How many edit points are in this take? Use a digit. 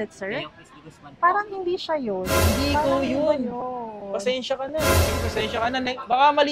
1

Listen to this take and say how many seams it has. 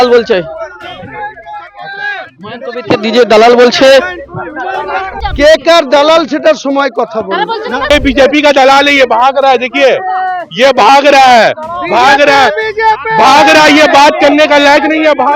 2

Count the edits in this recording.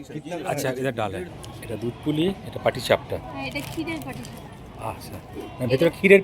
1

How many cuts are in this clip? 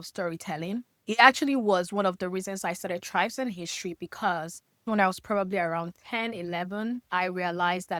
0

